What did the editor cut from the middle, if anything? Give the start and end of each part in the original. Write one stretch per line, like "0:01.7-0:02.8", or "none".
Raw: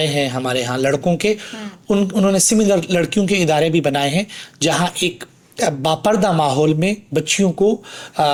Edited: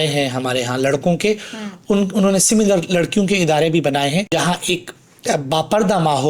0:04.3-0:04.6